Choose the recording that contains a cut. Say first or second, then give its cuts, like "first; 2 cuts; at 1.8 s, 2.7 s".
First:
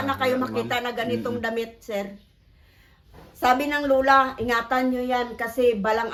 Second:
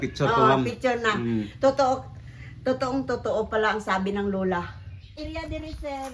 second; 1 cut; at 5.2 s